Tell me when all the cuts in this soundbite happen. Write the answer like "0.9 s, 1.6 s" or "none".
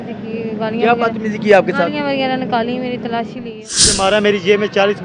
3.8 s